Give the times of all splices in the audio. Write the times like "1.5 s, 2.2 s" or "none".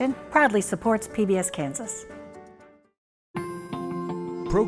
3.1 s